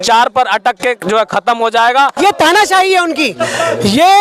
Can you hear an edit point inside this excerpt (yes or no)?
yes